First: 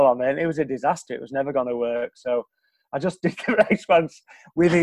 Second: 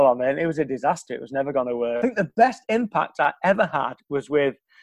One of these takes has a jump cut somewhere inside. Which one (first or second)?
second